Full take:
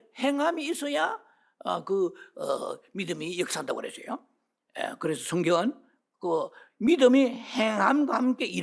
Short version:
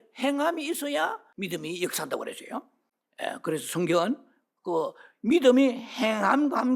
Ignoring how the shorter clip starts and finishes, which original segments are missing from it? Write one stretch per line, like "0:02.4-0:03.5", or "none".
0:01.3-0:02.9